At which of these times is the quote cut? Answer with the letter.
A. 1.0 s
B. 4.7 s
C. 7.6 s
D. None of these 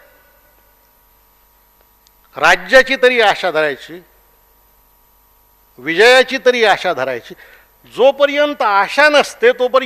D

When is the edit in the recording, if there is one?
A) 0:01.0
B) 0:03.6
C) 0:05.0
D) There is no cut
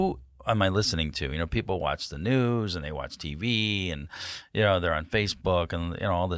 D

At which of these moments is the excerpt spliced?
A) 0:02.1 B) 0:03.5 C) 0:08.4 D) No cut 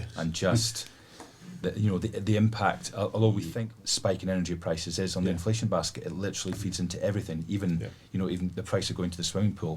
B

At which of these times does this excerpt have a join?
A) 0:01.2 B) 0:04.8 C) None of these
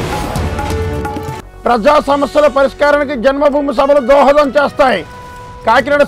A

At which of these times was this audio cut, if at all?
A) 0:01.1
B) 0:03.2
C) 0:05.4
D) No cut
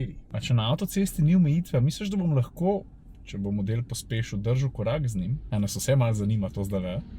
C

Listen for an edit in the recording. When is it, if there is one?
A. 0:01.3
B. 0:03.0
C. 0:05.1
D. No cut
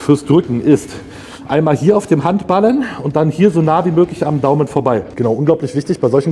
C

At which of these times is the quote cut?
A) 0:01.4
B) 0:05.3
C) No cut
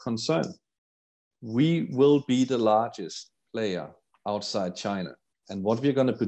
A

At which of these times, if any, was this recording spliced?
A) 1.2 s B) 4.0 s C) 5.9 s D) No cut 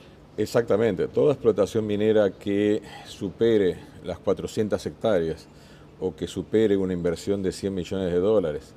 D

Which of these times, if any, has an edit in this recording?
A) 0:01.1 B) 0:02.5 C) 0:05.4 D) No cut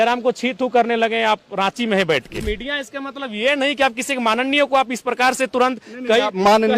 B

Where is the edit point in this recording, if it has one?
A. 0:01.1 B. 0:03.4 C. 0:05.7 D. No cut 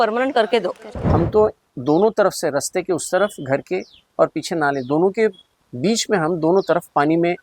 A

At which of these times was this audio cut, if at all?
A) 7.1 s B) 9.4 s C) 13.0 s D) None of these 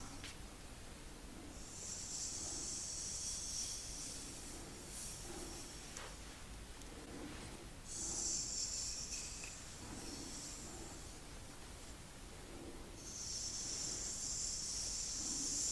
D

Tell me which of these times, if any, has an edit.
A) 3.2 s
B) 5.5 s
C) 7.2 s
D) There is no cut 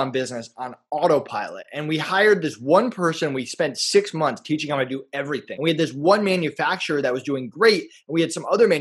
B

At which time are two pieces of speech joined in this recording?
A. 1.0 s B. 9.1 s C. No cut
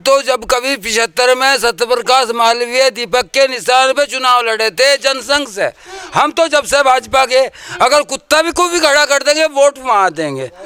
C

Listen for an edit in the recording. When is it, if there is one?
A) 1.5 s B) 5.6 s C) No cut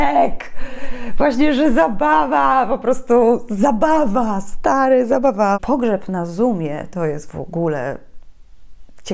B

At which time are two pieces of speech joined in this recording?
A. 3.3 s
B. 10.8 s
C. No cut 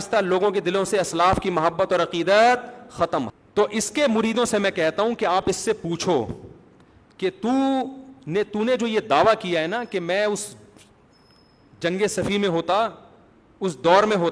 A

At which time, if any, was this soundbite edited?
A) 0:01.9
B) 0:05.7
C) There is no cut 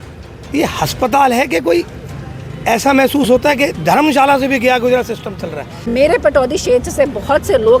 B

